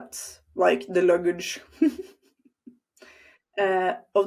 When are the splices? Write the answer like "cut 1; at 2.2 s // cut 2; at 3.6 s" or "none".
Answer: none